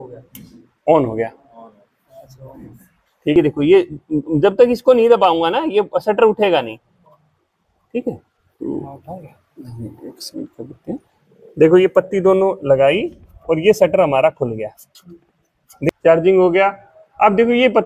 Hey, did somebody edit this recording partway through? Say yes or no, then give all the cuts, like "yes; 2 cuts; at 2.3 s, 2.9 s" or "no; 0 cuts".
yes; 2 cuts; at 3.3 s, 15.9 s